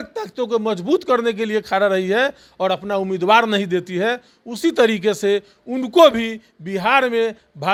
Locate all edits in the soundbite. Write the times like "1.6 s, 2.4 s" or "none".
none